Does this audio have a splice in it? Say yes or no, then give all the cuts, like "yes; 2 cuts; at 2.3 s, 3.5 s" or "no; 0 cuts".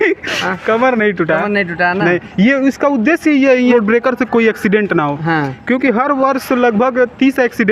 yes; 1 cut; at 3.7 s